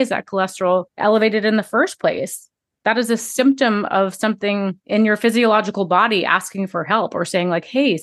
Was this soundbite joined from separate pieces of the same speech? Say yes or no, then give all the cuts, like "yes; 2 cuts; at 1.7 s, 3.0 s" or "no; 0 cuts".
yes; 2 cuts; at 0.9 s, 4.8 s